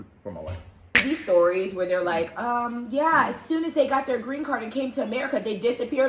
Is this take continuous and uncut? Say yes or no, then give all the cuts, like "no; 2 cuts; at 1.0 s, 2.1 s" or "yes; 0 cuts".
no; 1 cut; at 1.0 s